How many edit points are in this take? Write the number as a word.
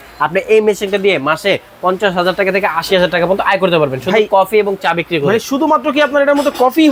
zero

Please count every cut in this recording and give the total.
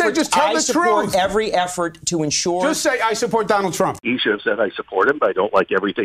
one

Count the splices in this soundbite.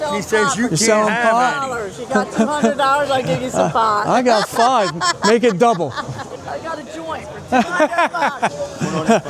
one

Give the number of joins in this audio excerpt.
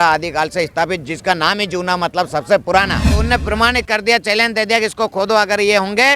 one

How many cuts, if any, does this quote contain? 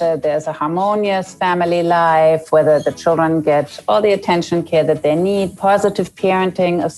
zero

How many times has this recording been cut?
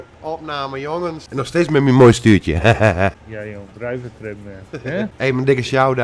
three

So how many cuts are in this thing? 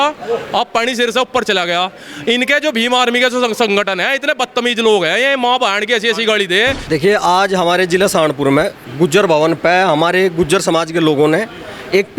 one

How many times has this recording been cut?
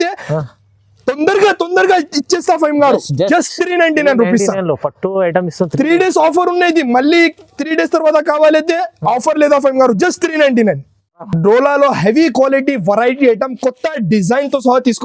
zero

